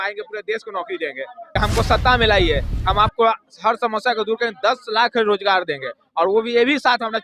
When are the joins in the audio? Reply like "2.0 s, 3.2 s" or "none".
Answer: 1.4 s